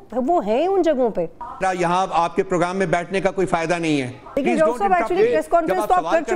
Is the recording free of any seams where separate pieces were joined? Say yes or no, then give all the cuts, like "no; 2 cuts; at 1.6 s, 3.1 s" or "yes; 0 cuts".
no; 2 cuts; at 1.6 s, 4.3 s